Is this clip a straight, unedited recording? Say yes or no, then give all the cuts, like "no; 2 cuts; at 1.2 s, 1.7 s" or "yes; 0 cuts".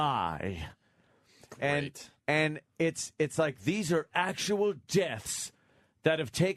yes; 0 cuts